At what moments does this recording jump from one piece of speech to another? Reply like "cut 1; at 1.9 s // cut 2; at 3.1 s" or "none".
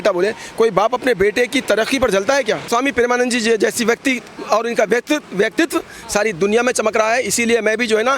cut 1; at 2.7 s

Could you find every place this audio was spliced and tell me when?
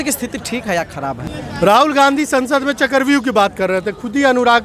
cut 1; at 1.2 s

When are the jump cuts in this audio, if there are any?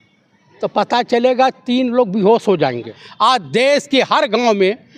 cut 1; at 3.0 s

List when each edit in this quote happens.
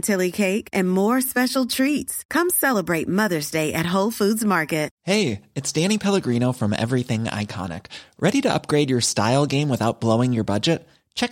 cut 1; at 5.0 s

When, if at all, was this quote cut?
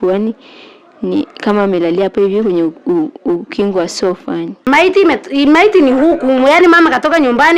cut 1; at 4.5 s

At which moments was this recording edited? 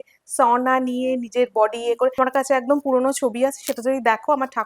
cut 1; at 2.1 s

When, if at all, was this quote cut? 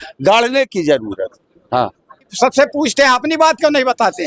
cut 1; at 2.3 s

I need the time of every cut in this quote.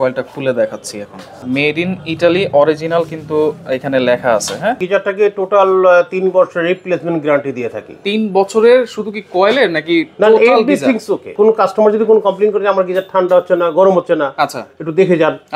cut 1; at 1.4 s // cut 2; at 4.8 s // cut 3; at 11.3 s

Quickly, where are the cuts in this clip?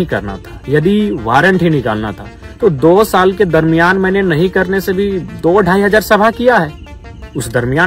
none

